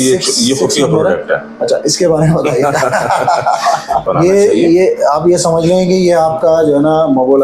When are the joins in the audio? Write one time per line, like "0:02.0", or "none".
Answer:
0:04.0